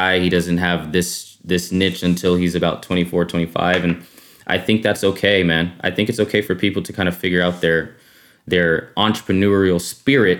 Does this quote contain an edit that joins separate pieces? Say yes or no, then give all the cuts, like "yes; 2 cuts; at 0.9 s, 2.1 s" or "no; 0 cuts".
no; 0 cuts